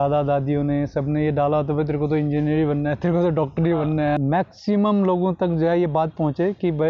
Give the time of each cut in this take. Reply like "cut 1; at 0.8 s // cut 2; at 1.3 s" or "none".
cut 1; at 4.2 s